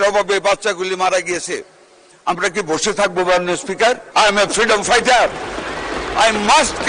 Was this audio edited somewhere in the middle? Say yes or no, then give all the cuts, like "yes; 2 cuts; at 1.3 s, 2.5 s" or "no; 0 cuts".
yes; 1 cut; at 4.0 s